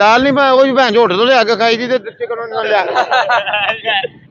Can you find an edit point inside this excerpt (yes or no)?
no